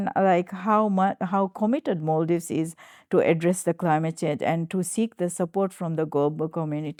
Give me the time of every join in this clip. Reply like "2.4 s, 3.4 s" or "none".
none